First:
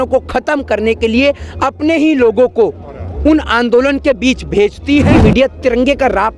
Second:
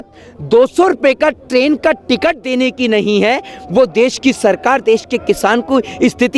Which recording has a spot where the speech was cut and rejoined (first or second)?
first